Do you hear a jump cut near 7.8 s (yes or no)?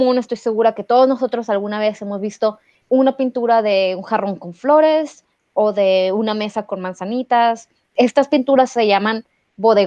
yes